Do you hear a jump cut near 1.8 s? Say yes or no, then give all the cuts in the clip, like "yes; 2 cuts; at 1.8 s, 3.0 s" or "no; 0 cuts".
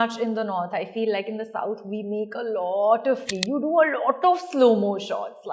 no; 1 cut; at 3.3 s